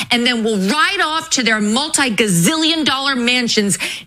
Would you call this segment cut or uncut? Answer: uncut